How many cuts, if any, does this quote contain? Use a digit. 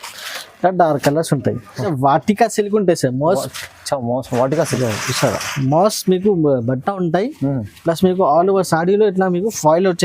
1